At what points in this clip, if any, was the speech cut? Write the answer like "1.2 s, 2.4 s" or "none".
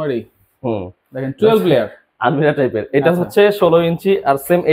none

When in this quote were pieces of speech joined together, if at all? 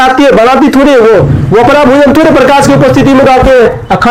none

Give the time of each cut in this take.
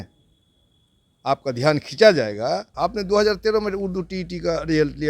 2.7 s

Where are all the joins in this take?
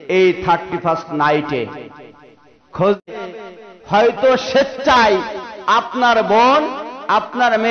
3.1 s

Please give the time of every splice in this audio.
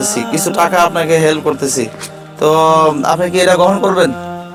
none

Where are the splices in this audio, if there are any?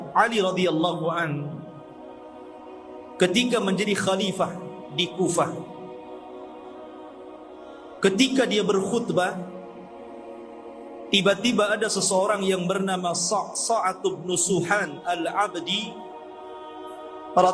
none

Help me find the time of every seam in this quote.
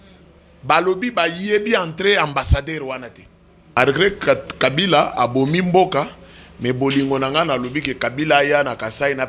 3.7 s

